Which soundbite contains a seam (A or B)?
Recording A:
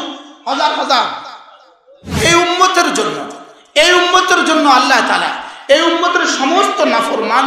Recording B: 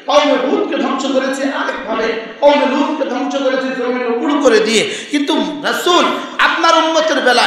A